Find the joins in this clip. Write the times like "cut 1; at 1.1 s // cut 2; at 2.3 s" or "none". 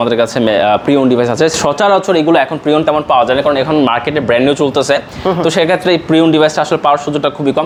none

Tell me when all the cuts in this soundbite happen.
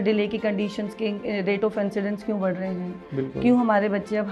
none

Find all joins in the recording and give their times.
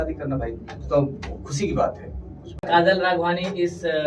cut 1; at 2.6 s

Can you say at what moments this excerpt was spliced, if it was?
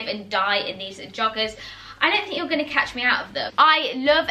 none

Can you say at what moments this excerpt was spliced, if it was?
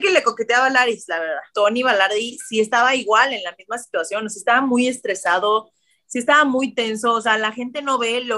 cut 1; at 1.4 s

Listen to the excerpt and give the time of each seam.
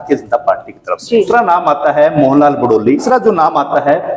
cut 1; at 1.3 s // cut 2; at 3.0 s

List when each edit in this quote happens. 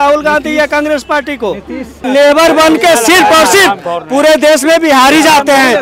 cut 1; at 2.1 s

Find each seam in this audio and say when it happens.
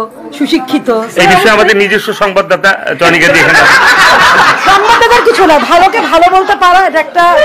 none

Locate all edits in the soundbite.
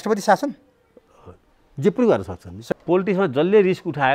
cut 1; at 2.5 s

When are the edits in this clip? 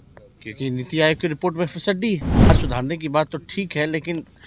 cut 1; at 2.5 s

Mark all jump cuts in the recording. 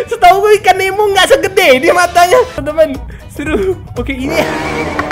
cut 1; at 2.6 s

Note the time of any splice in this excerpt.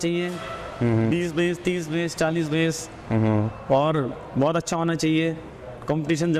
none

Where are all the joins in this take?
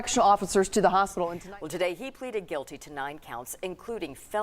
cut 1; at 1.3 s

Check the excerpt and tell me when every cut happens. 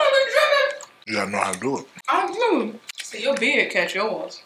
cut 1; at 0.9 s // cut 2; at 1.9 s // cut 3; at 3.2 s

